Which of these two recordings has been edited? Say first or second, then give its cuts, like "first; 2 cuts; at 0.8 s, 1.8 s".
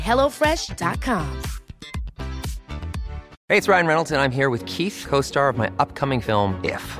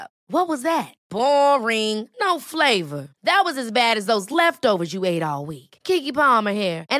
first; 1 cut; at 3.3 s